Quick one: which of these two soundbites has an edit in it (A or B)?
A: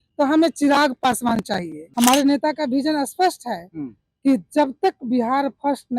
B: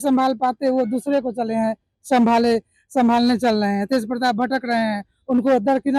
A